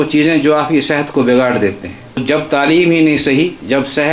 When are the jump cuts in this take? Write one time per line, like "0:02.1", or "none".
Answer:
0:02.2